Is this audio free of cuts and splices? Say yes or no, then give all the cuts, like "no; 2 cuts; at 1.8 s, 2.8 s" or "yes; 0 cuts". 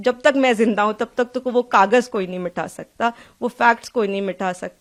yes; 0 cuts